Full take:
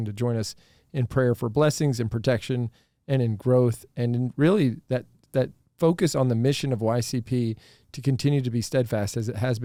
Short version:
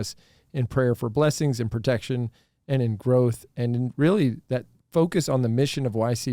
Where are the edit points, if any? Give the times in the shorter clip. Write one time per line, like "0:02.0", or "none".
0:04.8